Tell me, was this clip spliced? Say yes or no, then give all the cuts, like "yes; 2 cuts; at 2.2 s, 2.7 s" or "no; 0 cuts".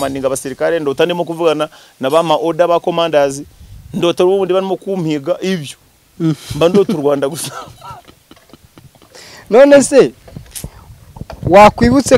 no; 0 cuts